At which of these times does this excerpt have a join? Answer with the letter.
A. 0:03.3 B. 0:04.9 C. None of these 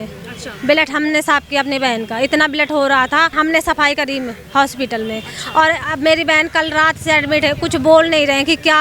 A